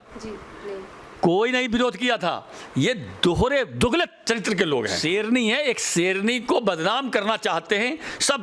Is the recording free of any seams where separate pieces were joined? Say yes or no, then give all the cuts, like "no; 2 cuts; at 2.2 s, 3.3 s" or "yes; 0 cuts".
no; 1 cut; at 5.0 s